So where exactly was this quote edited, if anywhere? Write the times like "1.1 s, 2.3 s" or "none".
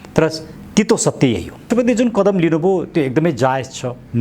1.6 s